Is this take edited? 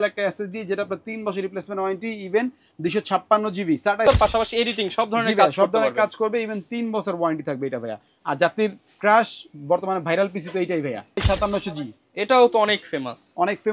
yes; 2 cuts; at 4.1 s, 11.2 s

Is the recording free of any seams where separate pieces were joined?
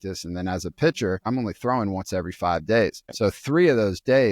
no; 2 cuts; at 1.3 s, 3.1 s

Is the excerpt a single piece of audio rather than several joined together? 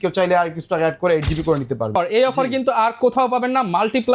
no; 1 cut; at 1.9 s

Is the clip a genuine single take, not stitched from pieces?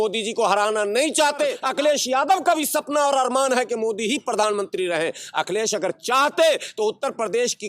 no; 1 cut; at 1.6 s

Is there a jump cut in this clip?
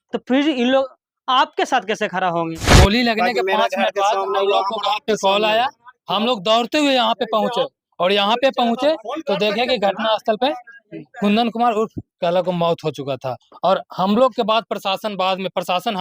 yes; 1 cut; at 2.7 s

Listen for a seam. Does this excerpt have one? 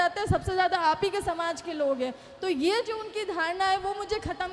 no; 0 cuts

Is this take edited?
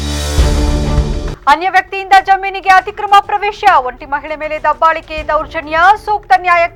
no; 0 cuts

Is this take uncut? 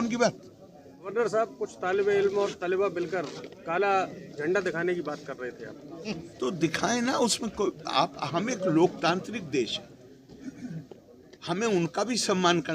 no; 1 cut; at 1.0 s

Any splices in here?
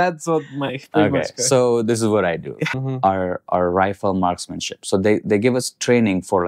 yes; 1 cut; at 2.6 s

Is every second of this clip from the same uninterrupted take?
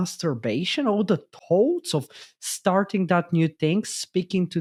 yes; 0 cuts

